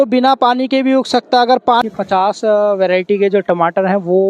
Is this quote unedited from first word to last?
no; 1 cut; at 1.8 s

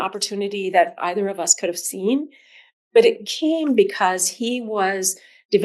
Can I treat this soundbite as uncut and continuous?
yes; 0 cuts

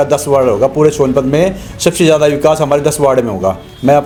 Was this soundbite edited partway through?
no; 0 cuts

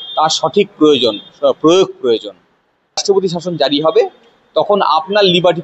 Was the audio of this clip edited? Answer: yes; 1 cut; at 3.0 s

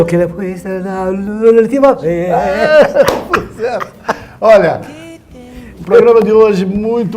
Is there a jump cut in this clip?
yes; 1 cut; at 4.4 s

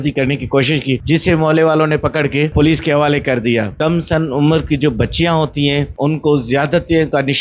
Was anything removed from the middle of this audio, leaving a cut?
yes; 4 cuts; at 1.0 s, 2.5 s, 3.7 s, 5.9 s

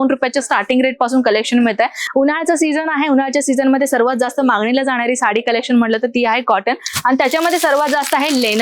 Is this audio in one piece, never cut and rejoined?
yes; 0 cuts

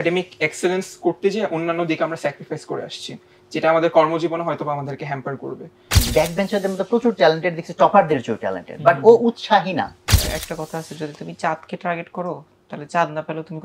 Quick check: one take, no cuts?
no; 2 cuts; at 6.0 s, 10.0 s

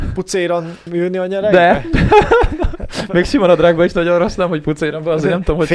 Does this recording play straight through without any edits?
yes; 0 cuts

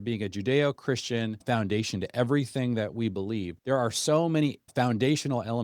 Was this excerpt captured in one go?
no; 3 cuts; at 1.4 s, 3.5 s, 4.6 s

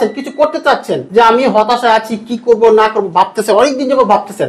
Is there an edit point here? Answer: yes; 1 cut; at 1.0 s

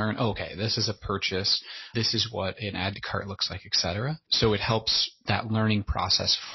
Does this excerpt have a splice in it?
yes; 2 cuts; at 1.8 s, 4.3 s

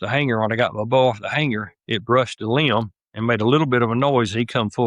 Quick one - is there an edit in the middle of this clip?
no; 0 cuts

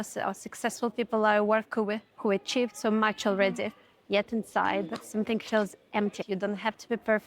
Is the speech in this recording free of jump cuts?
no; 2 cuts; at 2.1 s, 6.2 s

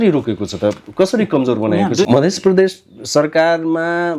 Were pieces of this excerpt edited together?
yes; 1 cut; at 2.1 s

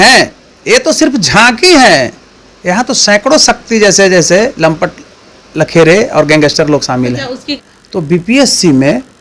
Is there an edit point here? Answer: yes; 1 cut; at 7.6 s

